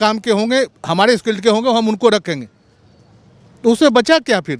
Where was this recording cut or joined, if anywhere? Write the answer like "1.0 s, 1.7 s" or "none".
none